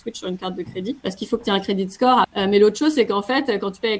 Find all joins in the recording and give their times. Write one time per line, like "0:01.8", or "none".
0:01.0
0:02.3